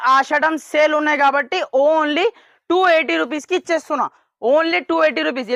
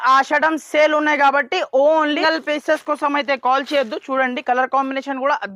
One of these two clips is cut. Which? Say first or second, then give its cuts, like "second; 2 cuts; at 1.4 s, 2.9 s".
second; 1 cut; at 2.2 s